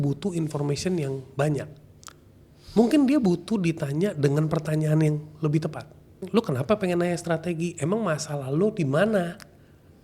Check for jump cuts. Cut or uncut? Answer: cut